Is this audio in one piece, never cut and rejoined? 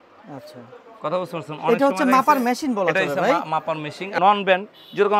no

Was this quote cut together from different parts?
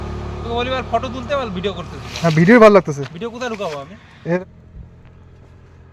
yes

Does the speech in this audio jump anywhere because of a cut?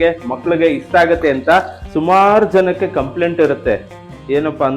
yes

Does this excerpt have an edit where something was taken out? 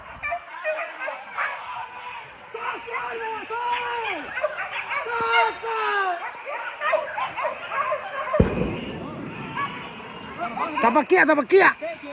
no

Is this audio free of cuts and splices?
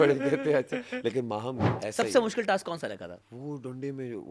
no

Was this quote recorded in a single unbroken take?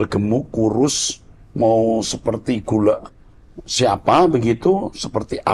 yes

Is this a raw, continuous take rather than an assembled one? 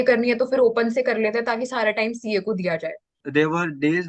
no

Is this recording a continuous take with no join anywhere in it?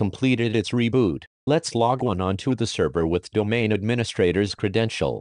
no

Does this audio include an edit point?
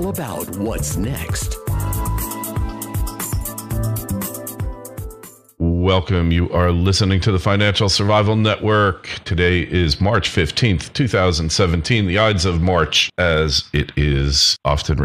yes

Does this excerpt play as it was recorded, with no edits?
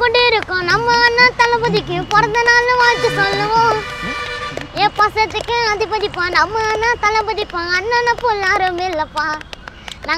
yes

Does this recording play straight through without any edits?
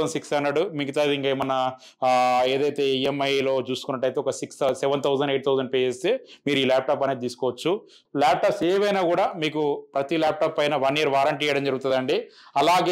no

